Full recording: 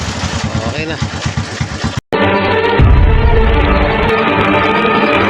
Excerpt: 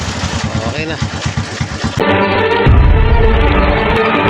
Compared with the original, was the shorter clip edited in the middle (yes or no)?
yes